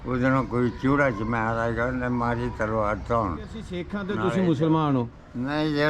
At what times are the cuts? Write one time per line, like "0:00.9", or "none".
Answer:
0:04.0